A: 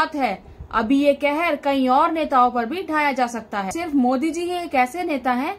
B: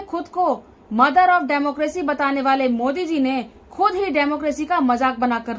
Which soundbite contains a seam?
A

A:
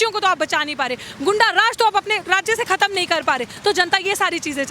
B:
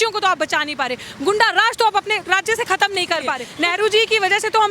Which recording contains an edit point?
B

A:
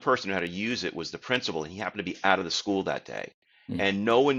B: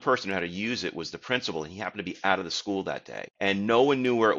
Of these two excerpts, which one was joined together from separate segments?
B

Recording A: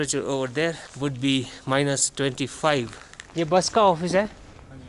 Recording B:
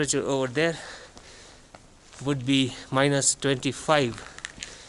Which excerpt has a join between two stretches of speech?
A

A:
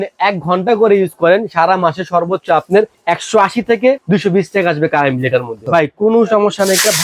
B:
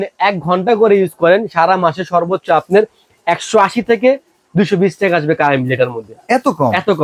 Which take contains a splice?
A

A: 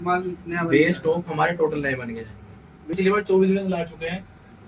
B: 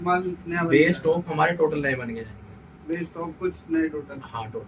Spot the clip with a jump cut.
A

